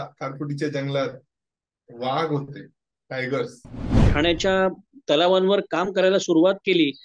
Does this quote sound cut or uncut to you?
cut